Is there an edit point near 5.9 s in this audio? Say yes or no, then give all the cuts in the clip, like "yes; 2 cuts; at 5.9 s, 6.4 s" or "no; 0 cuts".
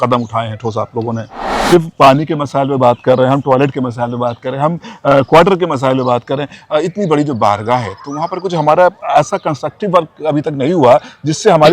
no; 1 cut; at 1.5 s